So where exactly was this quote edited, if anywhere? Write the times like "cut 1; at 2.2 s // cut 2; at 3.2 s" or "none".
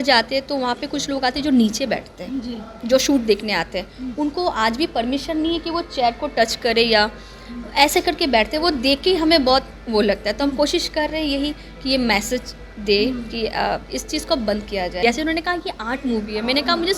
cut 1; at 15.0 s